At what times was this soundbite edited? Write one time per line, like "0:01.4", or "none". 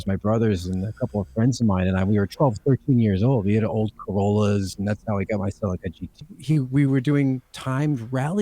0:06.2